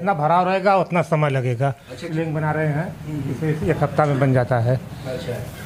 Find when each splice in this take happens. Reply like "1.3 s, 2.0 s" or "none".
none